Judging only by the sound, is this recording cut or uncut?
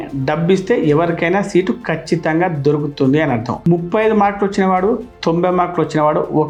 uncut